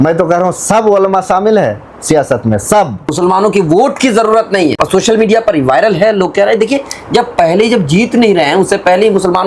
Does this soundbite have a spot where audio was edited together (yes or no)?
yes